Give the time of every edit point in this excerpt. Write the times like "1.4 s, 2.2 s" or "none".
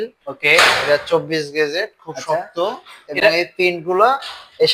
none